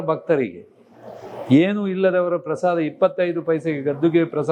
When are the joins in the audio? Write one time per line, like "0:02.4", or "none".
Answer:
none